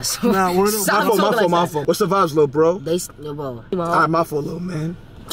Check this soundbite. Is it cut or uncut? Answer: cut